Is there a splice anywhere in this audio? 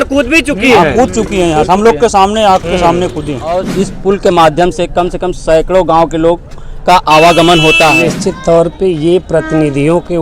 yes; 2 cuts; at 3.6 s, 8.1 s

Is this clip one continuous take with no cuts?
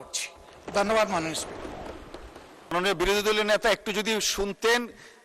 no; 1 cut; at 2.7 s

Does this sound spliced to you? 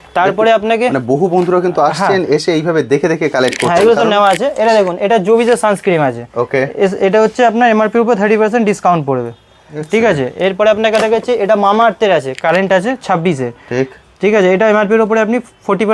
no; 0 cuts

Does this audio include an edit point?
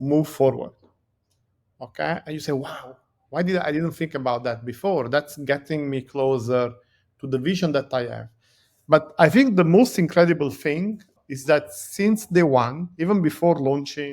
yes; 1 cut; at 11.1 s

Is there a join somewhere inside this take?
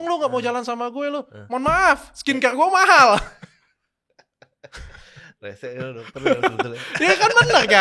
no; 0 cuts

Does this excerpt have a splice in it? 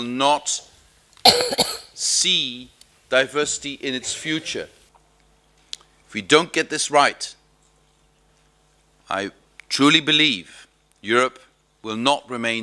yes; 1 cut; at 4.8 s

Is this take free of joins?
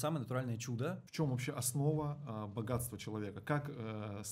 no; 1 cut; at 1.0 s

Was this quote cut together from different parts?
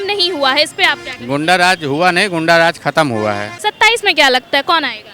yes; 1 cut; at 3.5 s

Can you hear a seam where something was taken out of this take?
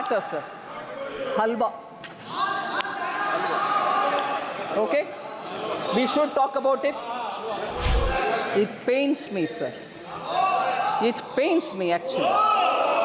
yes; 1 cut; at 7.7 s

